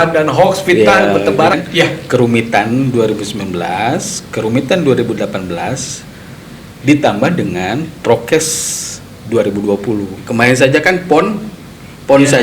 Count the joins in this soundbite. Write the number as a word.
two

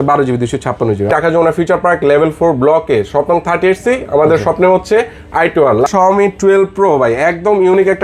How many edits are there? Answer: two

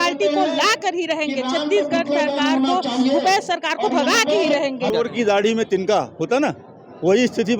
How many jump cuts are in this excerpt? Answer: one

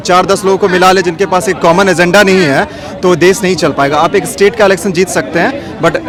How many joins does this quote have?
zero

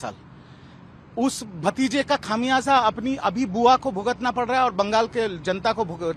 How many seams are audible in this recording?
zero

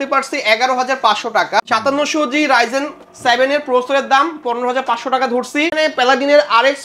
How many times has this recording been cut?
two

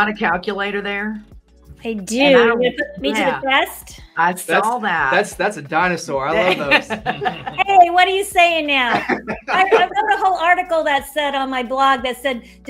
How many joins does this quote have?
zero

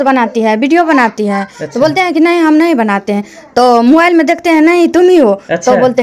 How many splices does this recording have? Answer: zero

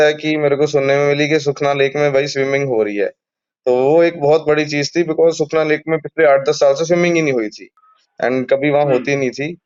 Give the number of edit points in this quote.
zero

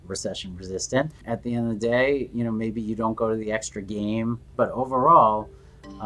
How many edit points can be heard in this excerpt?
two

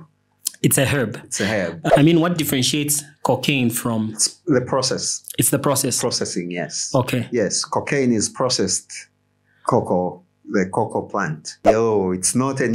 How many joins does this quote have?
two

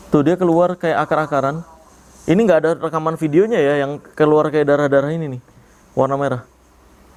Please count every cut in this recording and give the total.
zero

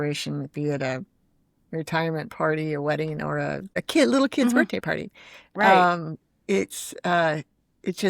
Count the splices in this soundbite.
one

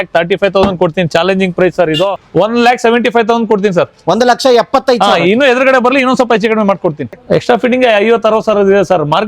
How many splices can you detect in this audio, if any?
two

